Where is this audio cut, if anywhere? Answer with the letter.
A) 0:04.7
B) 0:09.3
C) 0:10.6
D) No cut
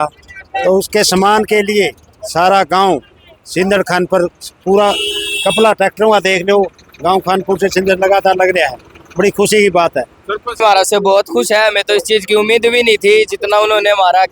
C